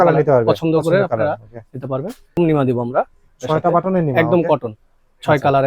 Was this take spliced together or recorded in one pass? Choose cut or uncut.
cut